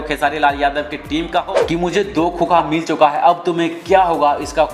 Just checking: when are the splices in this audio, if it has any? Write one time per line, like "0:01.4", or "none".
0:01.7

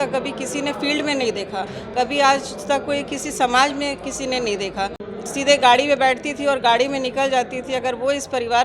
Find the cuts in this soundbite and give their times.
0:05.1

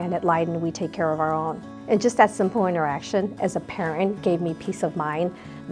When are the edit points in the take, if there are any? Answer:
none

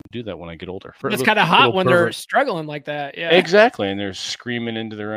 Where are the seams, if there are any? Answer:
0:01.0

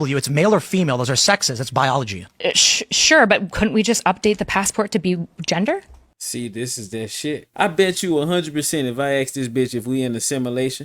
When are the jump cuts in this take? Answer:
0:07.5

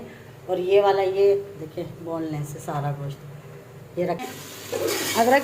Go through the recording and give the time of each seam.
0:04.2

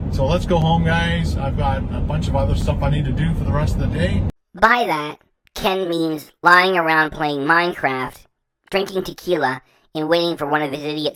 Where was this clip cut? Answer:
none

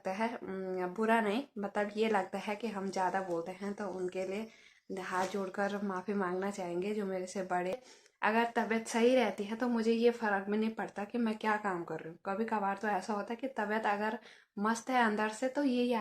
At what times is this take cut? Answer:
0:07.8

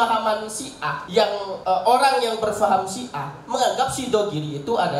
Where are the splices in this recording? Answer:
0:01.3

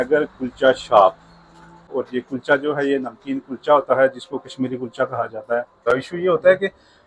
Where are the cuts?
0:02.0
0:05.8

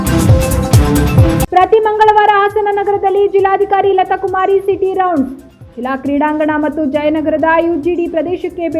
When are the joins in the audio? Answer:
0:01.5

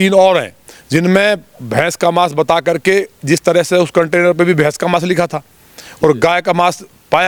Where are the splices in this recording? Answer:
none

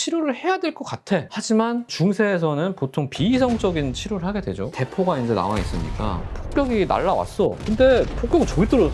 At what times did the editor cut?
0:04.7

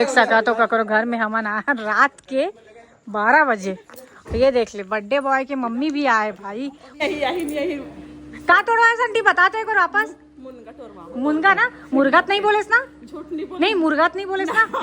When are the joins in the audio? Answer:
0:06.8

